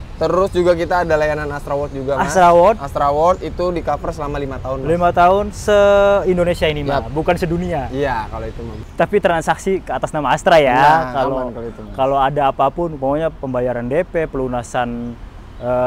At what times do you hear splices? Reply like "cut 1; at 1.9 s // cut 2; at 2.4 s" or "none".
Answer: cut 1; at 8.8 s